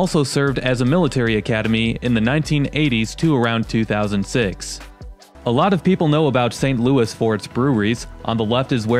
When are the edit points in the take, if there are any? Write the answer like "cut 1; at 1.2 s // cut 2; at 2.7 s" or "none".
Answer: cut 1; at 5.2 s